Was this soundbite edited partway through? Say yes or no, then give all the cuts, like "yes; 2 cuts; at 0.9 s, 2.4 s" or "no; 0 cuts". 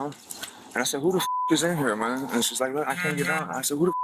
no; 0 cuts